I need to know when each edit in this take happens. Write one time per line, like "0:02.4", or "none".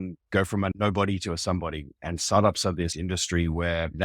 0:02.9